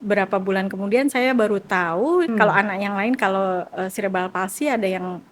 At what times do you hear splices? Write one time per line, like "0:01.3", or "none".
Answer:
0:02.3